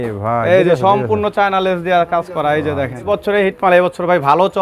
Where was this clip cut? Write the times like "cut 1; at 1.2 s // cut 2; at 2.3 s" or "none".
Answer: cut 1; at 3.1 s